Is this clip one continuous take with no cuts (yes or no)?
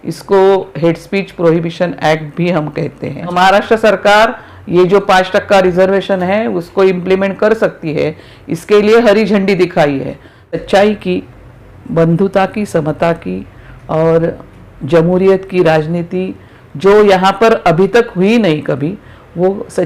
no